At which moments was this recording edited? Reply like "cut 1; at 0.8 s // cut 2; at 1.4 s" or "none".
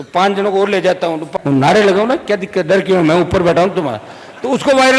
cut 1; at 1.3 s

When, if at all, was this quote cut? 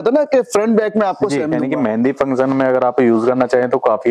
cut 1; at 1.6 s

